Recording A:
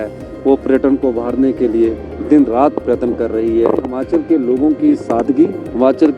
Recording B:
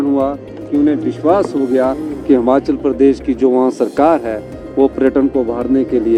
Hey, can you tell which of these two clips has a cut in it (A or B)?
A